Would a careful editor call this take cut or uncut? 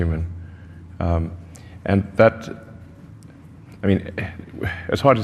uncut